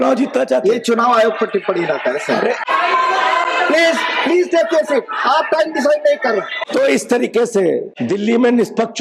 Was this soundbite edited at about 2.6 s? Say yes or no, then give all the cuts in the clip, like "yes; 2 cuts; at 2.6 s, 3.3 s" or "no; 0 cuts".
yes; 3 cuts; at 2.6 s, 6.6 s, 7.9 s